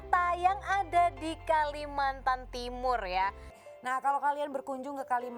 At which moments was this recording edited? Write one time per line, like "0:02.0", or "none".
0:03.5